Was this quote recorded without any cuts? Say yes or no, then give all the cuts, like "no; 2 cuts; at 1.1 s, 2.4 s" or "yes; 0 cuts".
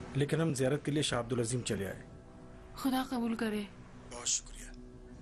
no; 1 cut; at 1.1 s